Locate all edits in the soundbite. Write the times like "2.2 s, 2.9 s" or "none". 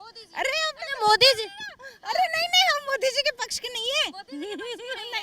none